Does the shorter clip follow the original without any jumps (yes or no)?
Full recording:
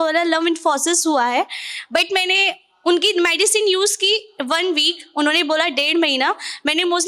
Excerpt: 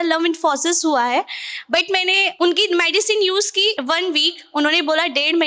no